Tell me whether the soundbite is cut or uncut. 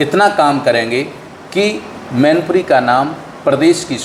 uncut